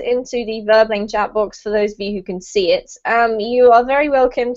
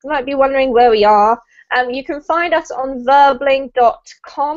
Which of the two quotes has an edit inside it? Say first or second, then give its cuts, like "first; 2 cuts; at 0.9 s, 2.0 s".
first; 1 cut; at 2.4 s